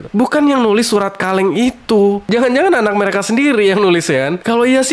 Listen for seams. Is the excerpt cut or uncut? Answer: uncut